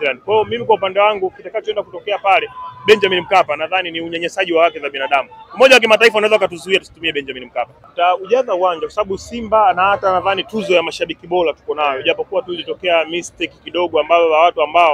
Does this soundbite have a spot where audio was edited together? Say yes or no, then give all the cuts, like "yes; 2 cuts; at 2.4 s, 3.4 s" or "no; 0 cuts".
yes; 1 cut; at 7.8 s